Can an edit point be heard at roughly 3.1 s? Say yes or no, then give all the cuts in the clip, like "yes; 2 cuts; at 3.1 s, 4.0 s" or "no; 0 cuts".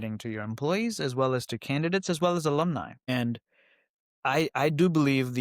yes; 1 cut; at 3.1 s